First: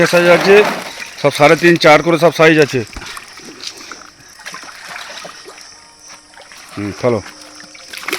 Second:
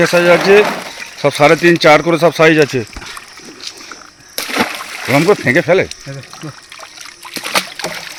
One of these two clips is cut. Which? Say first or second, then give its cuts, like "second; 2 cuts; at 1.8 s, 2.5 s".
first; 1 cut; at 4.2 s